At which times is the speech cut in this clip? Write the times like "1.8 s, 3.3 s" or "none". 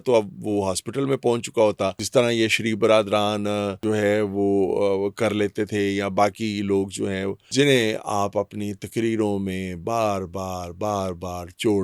2.0 s, 3.8 s, 7.4 s